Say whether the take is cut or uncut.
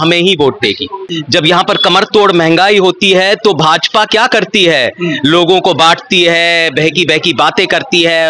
cut